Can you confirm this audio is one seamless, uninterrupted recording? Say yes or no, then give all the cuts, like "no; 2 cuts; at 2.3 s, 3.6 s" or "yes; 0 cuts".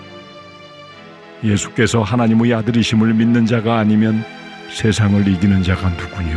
no; 1 cut; at 1.4 s